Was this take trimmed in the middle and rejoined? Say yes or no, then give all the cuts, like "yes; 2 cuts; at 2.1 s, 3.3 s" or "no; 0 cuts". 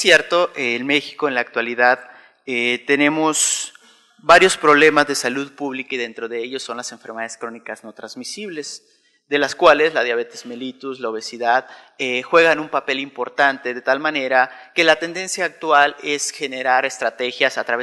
yes; 1 cut; at 7.8 s